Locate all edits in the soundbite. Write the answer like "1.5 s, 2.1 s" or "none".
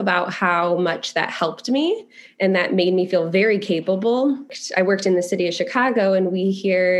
4.6 s